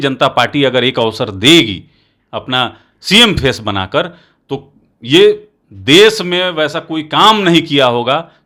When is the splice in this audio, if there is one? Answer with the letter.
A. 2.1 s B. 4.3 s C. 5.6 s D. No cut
D